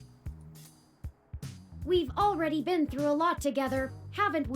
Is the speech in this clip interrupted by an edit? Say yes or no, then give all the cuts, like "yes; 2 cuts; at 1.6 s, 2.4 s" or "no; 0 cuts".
yes; 1 cut; at 1.7 s